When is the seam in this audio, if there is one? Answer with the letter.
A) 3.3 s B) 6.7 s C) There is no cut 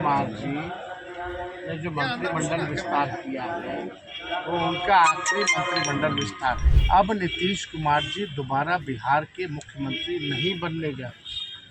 B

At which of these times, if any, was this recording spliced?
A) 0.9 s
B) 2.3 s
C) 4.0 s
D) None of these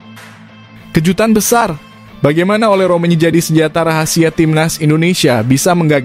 A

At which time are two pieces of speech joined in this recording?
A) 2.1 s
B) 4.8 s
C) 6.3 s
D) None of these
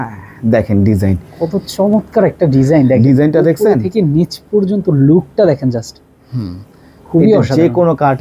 D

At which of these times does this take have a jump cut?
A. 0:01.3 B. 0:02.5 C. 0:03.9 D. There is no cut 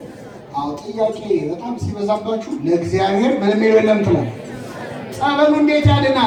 D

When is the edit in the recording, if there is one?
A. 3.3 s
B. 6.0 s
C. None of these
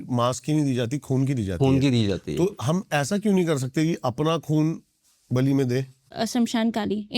B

